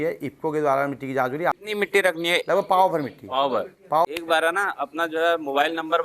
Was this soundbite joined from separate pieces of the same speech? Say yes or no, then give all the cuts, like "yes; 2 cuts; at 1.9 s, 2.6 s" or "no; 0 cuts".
yes; 2 cuts; at 1.5 s, 4.0 s